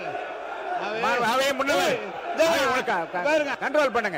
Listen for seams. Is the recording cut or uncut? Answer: uncut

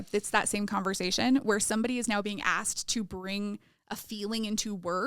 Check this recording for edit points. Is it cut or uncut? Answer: uncut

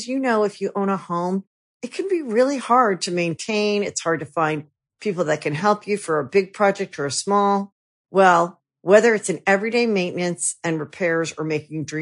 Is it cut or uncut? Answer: uncut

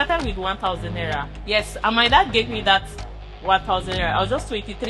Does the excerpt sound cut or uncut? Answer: cut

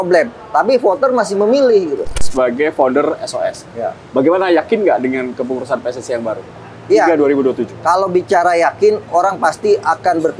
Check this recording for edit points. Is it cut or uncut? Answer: cut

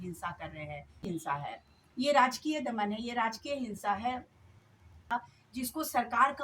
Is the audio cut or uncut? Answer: cut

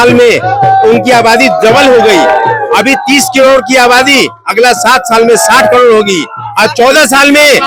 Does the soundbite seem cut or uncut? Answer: uncut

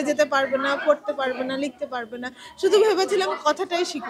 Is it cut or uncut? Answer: uncut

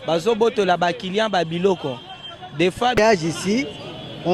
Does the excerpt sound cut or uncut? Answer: cut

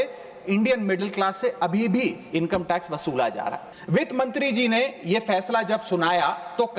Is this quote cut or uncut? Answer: cut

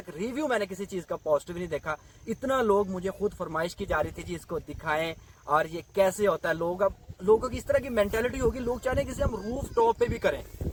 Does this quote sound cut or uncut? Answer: uncut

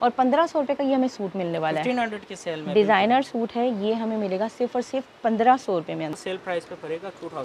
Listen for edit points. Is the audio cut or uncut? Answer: cut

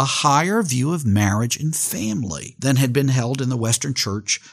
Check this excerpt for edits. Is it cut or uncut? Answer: cut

